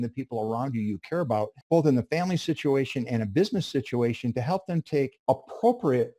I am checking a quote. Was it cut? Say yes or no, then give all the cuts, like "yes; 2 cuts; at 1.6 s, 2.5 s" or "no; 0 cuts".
yes; 2 cuts; at 1.6 s, 5.2 s